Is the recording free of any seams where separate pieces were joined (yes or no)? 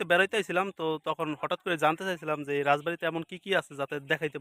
yes